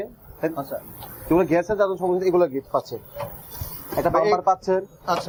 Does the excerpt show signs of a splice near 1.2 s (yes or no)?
no